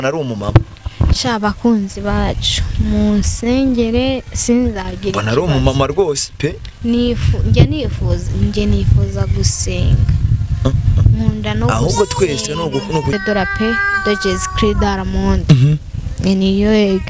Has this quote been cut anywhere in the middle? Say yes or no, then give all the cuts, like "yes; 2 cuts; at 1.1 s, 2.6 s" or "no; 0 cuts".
yes; 1 cut; at 13.1 s